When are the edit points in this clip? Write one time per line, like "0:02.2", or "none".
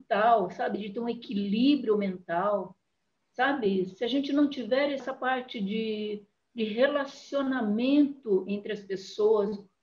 0:05.1